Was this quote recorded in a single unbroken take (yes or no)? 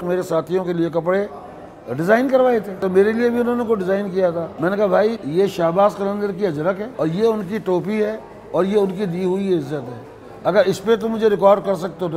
no